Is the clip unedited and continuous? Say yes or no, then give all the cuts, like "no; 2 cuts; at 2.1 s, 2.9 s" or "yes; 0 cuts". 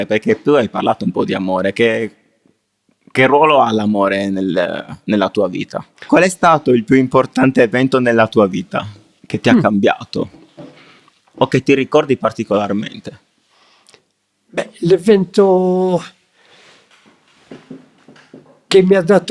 no; 1 cut; at 5.9 s